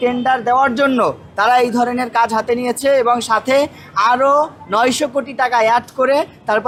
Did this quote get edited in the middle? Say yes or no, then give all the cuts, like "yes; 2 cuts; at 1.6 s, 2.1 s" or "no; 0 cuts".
no; 0 cuts